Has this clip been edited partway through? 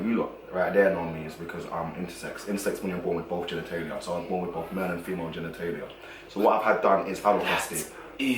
no; 0 cuts

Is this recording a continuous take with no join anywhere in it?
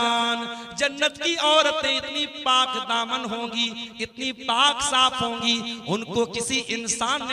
yes; 0 cuts

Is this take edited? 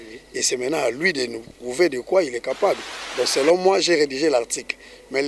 yes; 1 cut; at 3.0 s

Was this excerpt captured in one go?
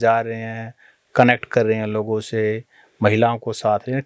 yes; 0 cuts

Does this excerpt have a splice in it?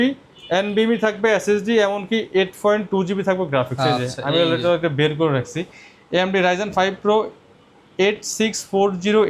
no; 0 cuts

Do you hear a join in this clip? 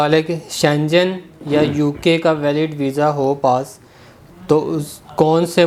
no; 0 cuts

